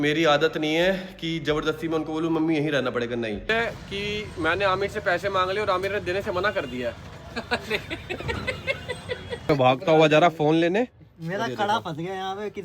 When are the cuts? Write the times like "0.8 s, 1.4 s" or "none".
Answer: 3.5 s, 9.5 s